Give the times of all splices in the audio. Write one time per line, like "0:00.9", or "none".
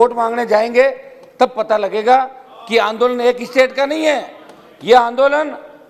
none